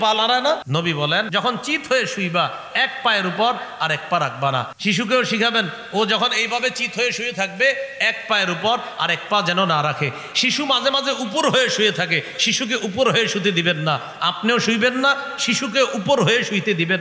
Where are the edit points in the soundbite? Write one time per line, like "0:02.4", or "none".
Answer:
0:01.1
0:04.7